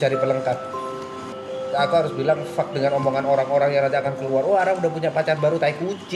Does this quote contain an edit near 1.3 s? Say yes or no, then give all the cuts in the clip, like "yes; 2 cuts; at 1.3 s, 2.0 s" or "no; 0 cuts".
yes; 1 cut; at 1.3 s